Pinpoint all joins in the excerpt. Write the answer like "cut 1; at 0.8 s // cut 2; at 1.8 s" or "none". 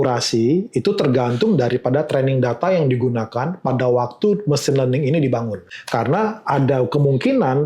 cut 1; at 5.6 s